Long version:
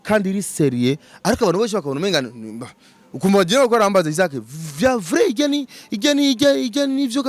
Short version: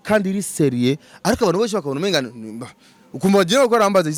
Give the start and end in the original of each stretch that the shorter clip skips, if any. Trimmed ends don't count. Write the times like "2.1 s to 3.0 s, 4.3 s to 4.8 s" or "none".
none